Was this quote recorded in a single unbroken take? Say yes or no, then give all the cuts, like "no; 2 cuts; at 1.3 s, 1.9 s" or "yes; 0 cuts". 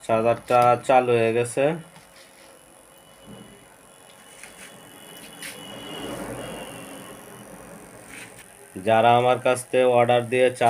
no; 1 cut; at 8.4 s